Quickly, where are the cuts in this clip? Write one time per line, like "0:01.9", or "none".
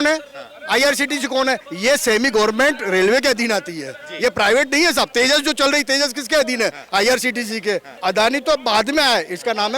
0:07.9